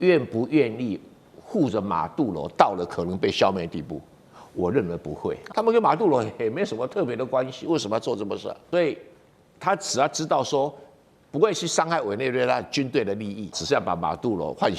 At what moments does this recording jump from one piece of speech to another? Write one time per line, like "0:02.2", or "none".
0:05.4
0:08.6
0:13.6